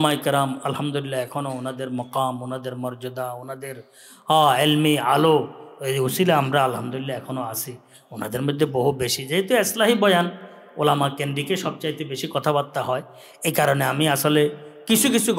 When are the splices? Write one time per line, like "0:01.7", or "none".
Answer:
none